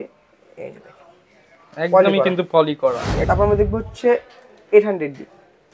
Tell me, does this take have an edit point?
yes; 1 cut; at 3.2 s

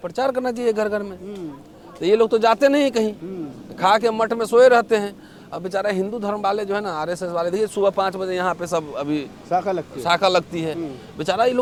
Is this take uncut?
yes; 0 cuts

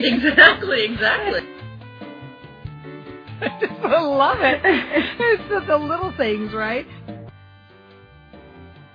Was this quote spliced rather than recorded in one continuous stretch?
yes; 1 cut; at 7.7 s

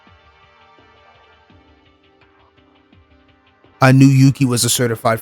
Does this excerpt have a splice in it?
yes; 1 cut; at 3.7 s

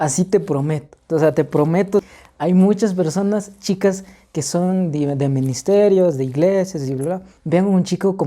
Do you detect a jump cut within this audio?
yes; 1 cut; at 2.2 s

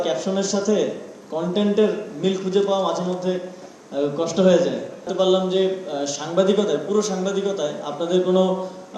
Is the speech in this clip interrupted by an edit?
yes; 1 cut; at 5.1 s

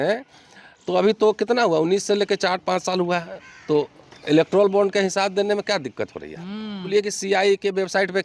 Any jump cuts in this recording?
yes; 1 cut; at 6.9 s

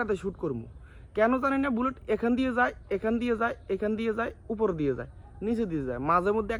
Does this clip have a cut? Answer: no; 0 cuts

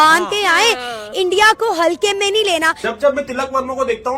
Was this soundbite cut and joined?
yes; 1 cut; at 3.0 s

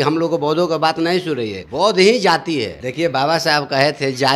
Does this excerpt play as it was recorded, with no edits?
no; 2 cuts; at 1.6 s, 2.8 s

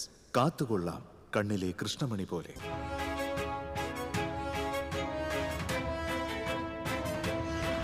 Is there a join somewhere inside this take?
yes; 1 cut; at 2.5 s

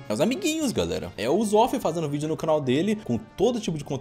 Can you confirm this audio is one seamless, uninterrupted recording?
no; 1 cut; at 3.0 s

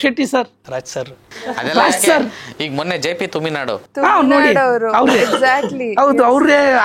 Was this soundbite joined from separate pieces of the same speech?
no; 0 cuts

